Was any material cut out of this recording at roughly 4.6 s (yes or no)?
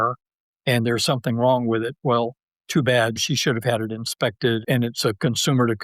yes